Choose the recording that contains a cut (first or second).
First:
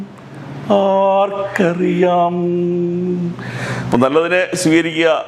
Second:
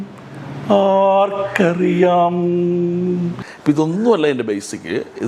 second